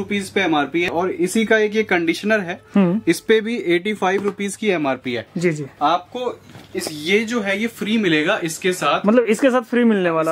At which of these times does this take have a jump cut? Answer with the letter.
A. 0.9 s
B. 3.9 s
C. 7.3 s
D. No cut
A